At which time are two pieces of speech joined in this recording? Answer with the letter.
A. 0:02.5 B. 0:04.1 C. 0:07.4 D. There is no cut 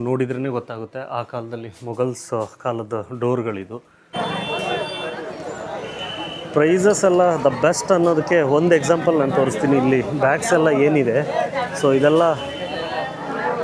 B